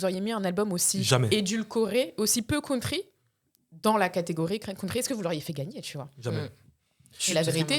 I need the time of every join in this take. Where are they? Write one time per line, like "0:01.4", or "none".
none

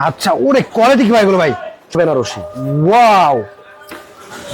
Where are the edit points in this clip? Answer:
0:01.9

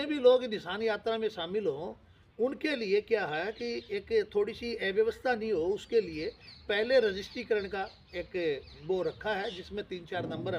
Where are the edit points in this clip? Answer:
none

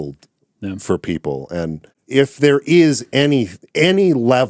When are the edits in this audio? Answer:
0:02.0

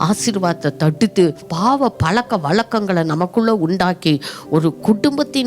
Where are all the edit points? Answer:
0:01.5

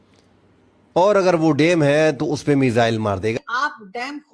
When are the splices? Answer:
0:03.3

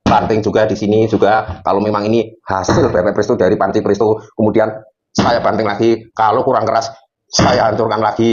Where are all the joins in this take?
none

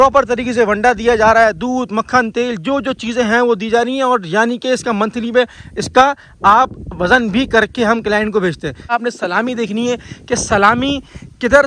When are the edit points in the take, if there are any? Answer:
0:08.9

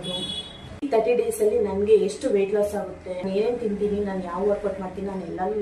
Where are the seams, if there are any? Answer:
0:00.9
0:03.2

